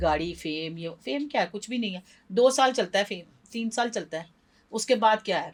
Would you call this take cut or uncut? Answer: uncut